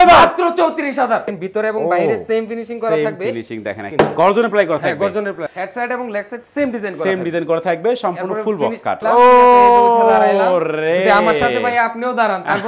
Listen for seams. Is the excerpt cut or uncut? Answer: cut